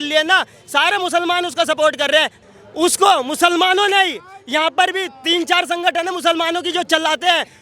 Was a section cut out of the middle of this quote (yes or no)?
yes